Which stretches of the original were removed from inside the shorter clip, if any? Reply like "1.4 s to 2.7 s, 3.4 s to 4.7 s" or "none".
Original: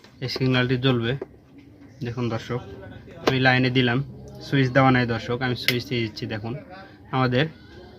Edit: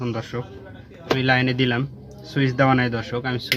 none